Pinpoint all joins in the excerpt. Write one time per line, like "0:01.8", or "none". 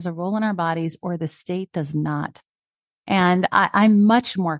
none